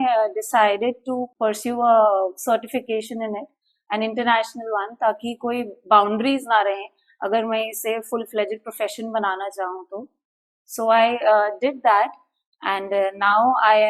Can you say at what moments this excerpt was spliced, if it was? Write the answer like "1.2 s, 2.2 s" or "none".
1.3 s